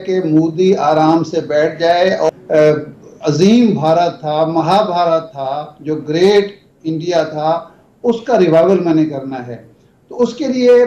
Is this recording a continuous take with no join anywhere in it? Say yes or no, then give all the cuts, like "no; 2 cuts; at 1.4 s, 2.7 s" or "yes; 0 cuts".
no; 1 cut; at 2.3 s